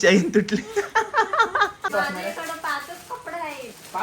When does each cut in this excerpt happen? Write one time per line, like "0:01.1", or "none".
0:01.9